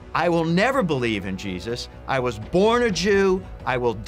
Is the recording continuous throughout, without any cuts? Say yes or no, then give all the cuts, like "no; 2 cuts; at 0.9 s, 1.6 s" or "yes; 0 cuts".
yes; 0 cuts